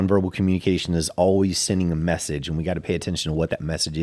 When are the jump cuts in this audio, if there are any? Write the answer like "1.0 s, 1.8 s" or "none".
none